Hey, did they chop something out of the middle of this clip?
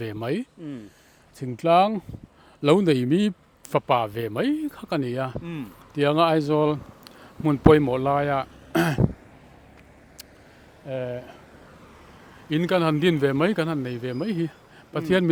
no; 0 cuts

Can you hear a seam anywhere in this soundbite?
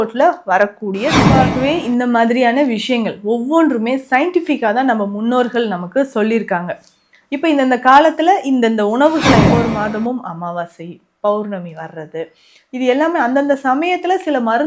yes; 2 cuts; at 1.4 s, 9.5 s

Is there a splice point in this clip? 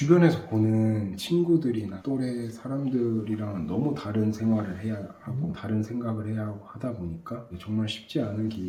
no; 0 cuts

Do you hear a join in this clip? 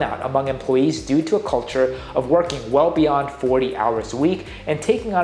no; 0 cuts

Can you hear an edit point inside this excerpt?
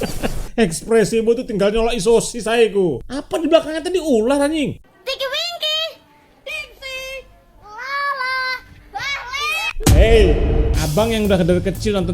yes; 1 cut; at 4.8 s

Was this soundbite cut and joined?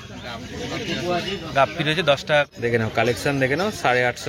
yes; 1 cut; at 2.5 s

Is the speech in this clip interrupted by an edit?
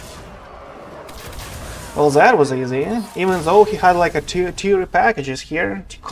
no; 0 cuts

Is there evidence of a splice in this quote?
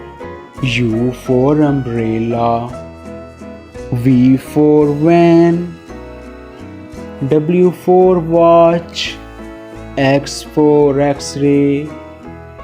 no; 0 cuts

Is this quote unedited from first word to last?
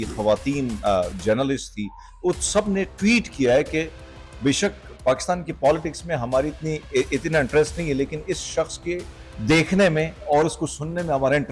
yes; 0 cuts

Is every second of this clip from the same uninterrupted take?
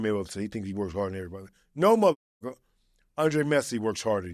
yes; 0 cuts

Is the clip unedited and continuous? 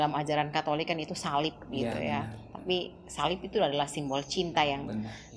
yes; 0 cuts

